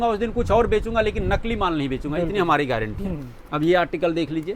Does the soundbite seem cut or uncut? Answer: uncut